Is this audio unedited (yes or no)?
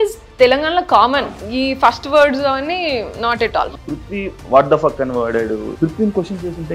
no